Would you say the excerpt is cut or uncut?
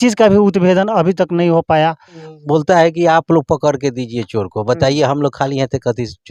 cut